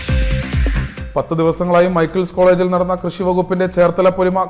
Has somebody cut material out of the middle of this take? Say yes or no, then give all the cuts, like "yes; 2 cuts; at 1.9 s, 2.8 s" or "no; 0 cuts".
yes; 1 cut; at 1.0 s